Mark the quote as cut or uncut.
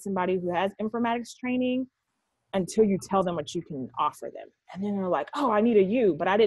uncut